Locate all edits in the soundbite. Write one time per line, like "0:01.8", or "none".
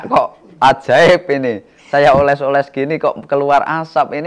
none